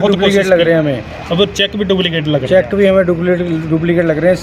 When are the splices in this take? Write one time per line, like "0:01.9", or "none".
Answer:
none